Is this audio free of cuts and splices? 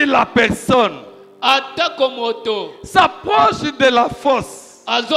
yes; 0 cuts

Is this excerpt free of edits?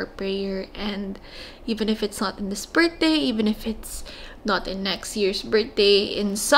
yes; 0 cuts

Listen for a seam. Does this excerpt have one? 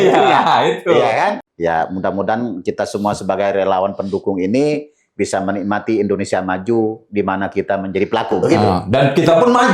yes; 1 cut; at 1.4 s

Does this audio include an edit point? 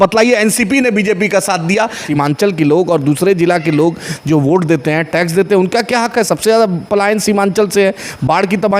yes; 1 cut; at 2.0 s

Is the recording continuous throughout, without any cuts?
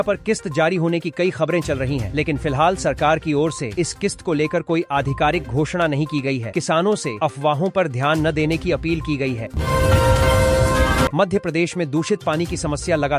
no; 2 cuts; at 9.5 s, 11.1 s

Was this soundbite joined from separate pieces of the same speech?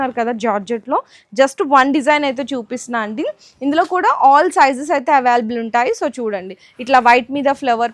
no; 0 cuts

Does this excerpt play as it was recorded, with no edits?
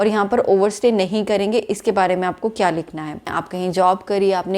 no; 1 cut; at 3.3 s

